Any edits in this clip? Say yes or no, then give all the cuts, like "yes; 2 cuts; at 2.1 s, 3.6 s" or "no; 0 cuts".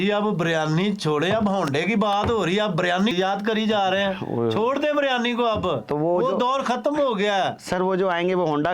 yes; 1 cut; at 3.1 s